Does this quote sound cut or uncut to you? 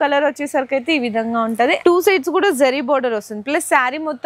cut